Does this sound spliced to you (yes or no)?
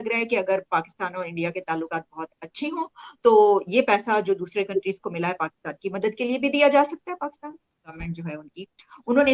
yes